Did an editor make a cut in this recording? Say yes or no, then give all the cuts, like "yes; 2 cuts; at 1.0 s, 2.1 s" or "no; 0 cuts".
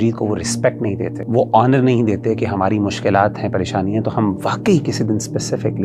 yes; 1 cut; at 1.2 s